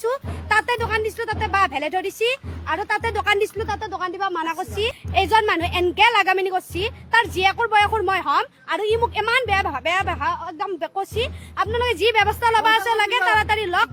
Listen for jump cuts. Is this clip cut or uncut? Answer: uncut